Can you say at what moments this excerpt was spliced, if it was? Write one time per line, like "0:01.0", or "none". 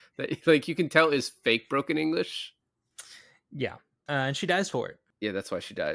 0:05.0